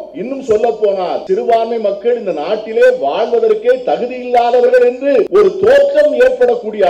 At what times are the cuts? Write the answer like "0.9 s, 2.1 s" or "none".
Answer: 1.2 s, 5.3 s